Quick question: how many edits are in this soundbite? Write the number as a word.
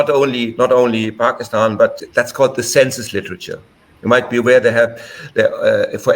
one